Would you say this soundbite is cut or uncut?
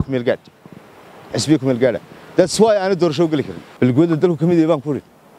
cut